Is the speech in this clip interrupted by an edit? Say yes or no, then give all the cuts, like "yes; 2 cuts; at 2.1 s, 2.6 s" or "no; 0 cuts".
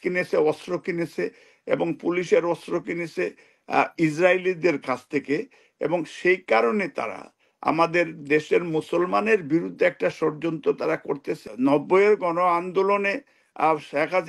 yes; 1 cut; at 11.4 s